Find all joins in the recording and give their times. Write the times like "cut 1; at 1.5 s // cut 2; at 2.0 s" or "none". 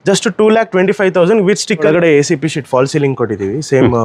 cut 1; at 1.8 s